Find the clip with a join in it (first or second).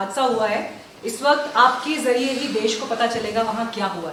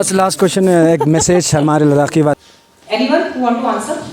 second